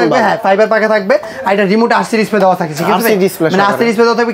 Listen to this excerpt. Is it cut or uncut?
uncut